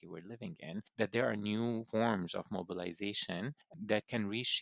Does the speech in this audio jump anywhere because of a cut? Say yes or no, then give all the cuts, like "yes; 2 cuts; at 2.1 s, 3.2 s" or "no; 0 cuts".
yes; 3 cuts; at 0.9 s, 1.9 s, 3.7 s